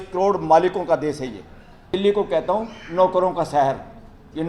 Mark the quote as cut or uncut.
cut